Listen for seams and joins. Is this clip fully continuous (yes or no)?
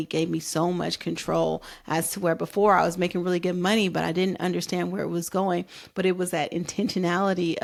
yes